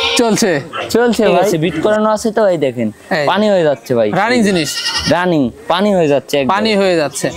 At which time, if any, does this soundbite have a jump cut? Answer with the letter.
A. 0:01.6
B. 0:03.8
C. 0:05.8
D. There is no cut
A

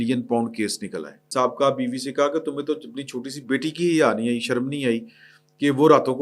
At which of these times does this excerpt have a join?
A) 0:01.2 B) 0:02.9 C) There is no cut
A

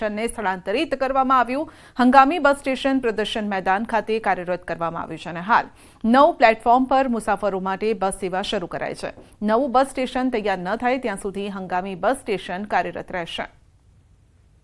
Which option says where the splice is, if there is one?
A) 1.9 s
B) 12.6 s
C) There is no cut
B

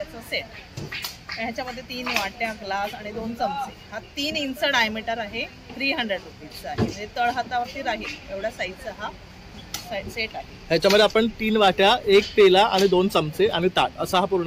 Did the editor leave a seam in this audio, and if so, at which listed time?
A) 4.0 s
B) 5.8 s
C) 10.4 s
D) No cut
D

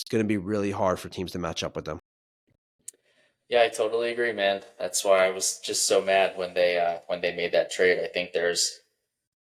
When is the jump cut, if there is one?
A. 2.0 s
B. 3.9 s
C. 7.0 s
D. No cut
D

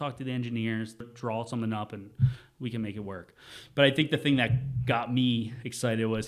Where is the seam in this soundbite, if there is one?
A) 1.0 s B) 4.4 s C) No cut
A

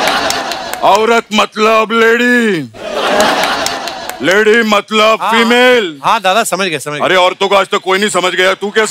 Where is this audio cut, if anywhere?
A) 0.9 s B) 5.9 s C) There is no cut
C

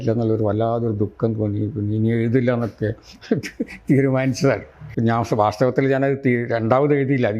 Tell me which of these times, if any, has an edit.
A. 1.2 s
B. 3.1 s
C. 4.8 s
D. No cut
C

